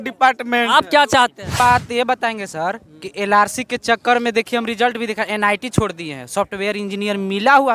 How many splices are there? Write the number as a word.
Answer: one